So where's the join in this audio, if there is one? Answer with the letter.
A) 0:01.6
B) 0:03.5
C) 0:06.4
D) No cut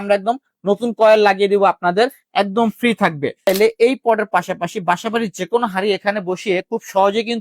B